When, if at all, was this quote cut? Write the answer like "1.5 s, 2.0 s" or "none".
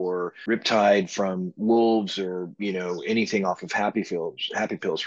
none